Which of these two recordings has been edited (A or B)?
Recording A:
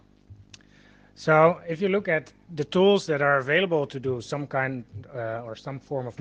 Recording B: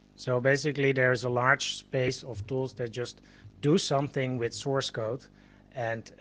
B